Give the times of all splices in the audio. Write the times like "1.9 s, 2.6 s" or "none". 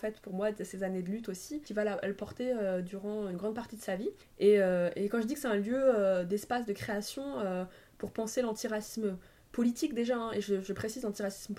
1.6 s, 4.3 s

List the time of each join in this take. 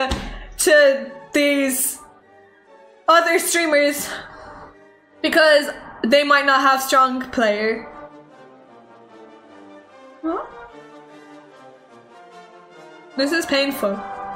12.1 s

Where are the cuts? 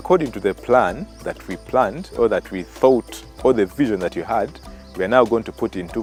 none

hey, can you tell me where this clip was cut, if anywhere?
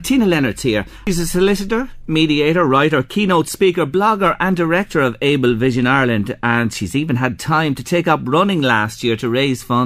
0.9 s

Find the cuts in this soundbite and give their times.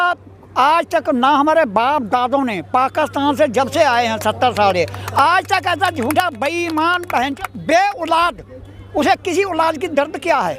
7.3 s

